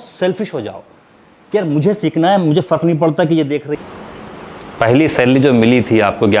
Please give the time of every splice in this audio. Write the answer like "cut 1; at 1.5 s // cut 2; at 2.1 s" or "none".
cut 1; at 3.7 s